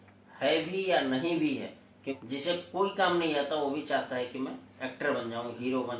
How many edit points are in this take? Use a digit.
1